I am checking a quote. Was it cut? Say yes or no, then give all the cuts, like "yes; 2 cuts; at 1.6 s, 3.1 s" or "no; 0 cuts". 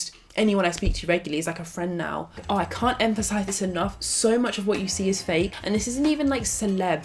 yes; 2 cuts; at 2.3 s, 5.6 s